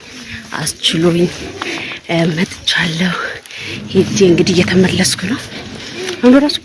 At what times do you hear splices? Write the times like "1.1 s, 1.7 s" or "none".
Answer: none